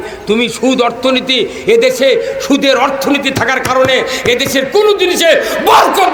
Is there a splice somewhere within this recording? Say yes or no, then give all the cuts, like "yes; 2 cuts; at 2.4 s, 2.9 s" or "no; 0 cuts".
no; 0 cuts